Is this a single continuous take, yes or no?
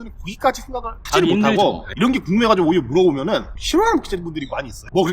no